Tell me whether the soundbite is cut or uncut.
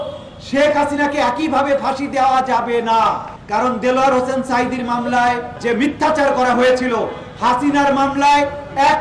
cut